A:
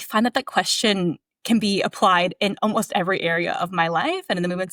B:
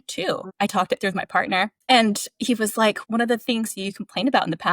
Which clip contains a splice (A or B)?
B